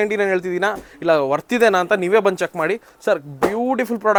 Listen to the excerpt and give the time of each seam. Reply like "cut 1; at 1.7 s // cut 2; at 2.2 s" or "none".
none